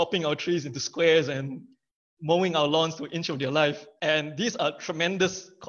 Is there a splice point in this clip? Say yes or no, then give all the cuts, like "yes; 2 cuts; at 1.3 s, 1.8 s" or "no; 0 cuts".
yes; 1 cut; at 3.9 s